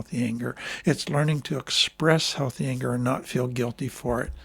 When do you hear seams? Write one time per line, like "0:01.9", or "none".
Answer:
none